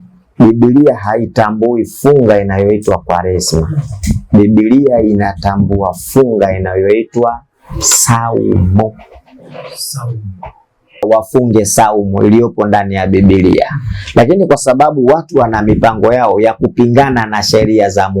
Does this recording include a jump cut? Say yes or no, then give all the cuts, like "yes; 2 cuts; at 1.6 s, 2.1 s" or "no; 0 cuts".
yes; 1 cut; at 11.0 s